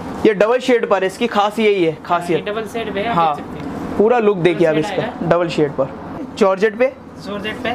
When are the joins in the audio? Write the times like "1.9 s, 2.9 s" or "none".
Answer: 6.2 s